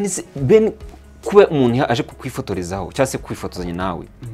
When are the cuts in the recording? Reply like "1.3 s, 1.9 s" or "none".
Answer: none